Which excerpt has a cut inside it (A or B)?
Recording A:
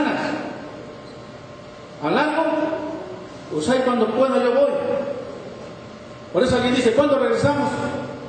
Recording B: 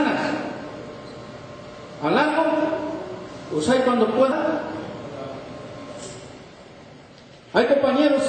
A